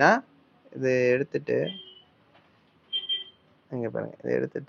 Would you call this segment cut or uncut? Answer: uncut